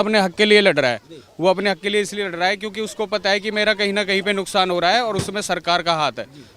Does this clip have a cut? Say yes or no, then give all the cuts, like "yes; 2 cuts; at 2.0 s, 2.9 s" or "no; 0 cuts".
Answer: no; 0 cuts